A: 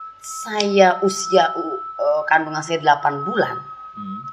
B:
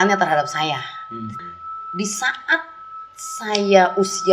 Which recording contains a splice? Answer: B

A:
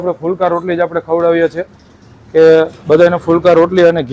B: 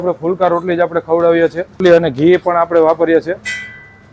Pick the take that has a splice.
B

